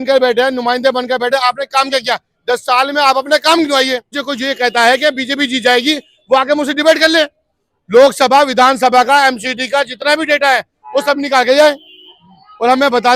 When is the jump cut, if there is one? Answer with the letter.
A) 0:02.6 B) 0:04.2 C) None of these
B